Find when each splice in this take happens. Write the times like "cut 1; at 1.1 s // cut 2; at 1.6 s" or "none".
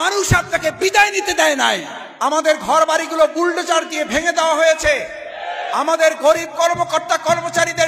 cut 1; at 2.0 s